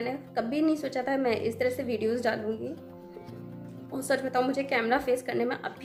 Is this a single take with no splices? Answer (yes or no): yes